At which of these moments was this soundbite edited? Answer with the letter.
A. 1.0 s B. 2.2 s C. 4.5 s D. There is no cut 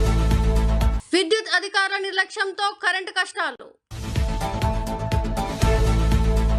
D